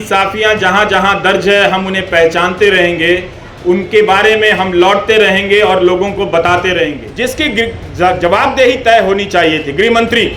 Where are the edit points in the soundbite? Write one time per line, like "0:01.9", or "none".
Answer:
0:07.0